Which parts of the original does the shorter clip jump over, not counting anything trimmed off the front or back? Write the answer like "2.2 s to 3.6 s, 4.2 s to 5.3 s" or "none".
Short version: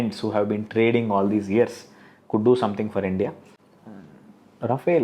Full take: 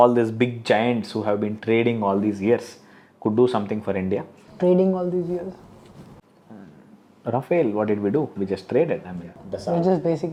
4.4 s to 6.1 s